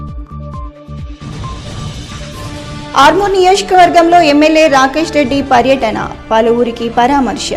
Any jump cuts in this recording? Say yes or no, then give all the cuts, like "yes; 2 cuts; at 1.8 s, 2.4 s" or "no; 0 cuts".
yes; 1 cut; at 1.7 s